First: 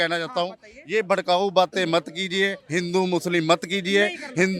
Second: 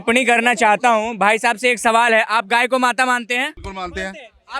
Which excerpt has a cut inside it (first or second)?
second